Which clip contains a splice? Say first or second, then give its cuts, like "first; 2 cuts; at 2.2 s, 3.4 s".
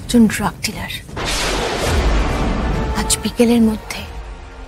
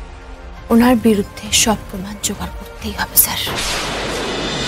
first; 1 cut; at 2.9 s